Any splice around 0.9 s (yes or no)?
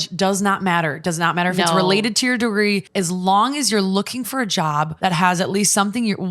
no